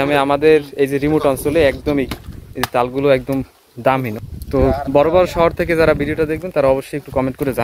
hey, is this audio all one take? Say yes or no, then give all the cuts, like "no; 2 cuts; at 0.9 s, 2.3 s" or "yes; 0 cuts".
no; 1 cut; at 4.1 s